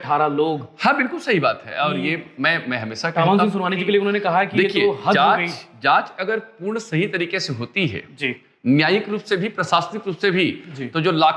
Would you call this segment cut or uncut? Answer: uncut